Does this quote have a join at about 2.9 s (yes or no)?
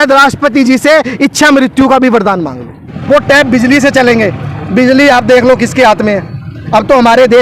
yes